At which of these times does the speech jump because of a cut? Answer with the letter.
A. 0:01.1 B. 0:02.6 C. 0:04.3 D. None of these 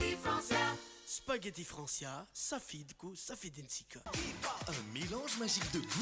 D